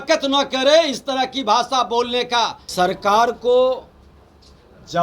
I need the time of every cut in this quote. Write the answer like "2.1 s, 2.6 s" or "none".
2.6 s